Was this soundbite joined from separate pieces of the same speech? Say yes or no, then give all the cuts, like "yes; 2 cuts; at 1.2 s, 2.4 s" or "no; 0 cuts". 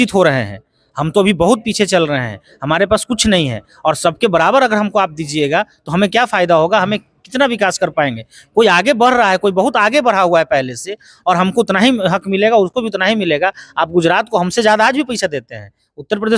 no; 0 cuts